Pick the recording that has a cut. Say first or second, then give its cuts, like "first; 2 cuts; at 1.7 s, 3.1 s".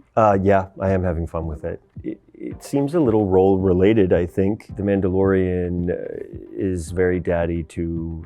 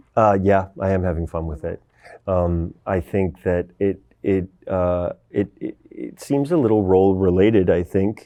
first; 2 cuts; at 2.1 s, 4.6 s